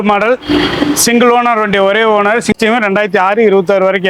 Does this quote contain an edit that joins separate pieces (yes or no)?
yes